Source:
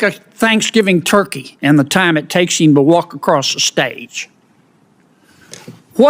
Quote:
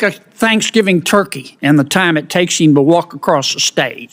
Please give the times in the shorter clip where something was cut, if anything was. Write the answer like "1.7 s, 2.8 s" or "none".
none